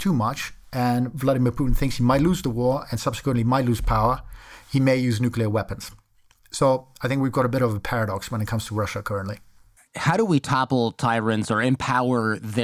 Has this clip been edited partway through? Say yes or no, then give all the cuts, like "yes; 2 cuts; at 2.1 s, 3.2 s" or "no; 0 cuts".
no; 0 cuts